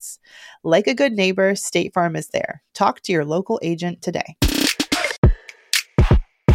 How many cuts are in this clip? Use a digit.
1